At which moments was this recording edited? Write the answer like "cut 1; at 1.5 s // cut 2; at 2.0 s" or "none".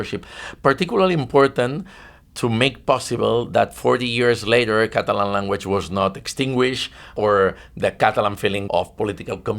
cut 1; at 7.1 s // cut 2; at 8.6 s